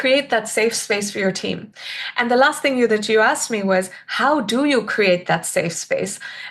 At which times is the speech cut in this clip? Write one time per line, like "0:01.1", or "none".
none